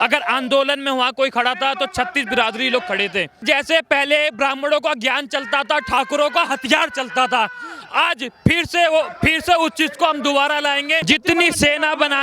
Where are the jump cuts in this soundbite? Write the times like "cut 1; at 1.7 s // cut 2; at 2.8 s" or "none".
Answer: cut 1; at 3.4 s // cut 2; at 11.0 s